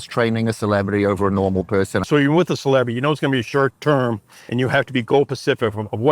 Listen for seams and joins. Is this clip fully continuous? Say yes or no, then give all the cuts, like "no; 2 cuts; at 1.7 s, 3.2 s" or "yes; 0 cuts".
no; 2 cuts; at 2.1 s, 3.8 s